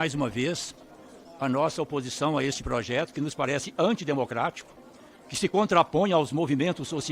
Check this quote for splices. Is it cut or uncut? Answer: uncut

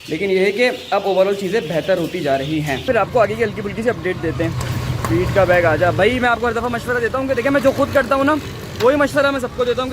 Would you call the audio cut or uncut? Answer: cut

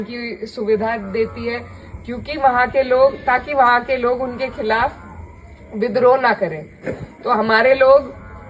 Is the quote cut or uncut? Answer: uncut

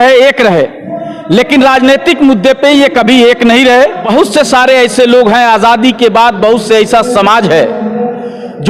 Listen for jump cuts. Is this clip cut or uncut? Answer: cut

